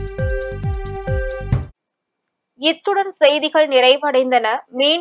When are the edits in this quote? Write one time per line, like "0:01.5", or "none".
none